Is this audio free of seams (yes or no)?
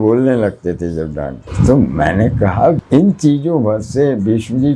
no